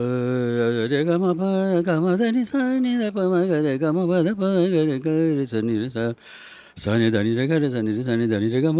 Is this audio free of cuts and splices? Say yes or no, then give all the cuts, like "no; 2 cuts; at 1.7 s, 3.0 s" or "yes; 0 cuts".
yes; 0 cuts